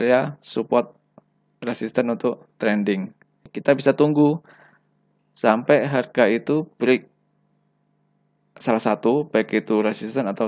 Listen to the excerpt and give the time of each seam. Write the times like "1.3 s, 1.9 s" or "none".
3.5 s